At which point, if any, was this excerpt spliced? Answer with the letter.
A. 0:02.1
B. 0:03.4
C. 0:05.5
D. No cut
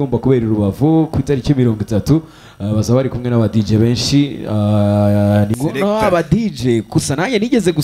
C